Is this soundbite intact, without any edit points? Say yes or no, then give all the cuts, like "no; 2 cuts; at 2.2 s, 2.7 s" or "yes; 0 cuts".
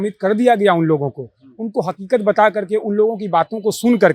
yes; 0 cuts